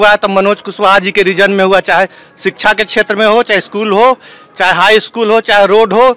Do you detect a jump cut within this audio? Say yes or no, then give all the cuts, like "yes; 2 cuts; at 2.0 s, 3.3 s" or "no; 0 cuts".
no; 0 cuts